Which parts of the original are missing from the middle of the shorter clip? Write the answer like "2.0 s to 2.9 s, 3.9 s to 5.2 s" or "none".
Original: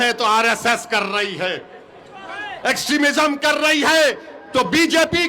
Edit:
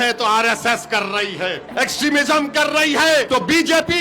1.6 s to 2.5 s, 4.1 s to 4.5 s